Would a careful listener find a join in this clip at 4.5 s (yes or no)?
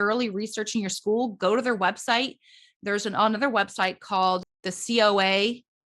yes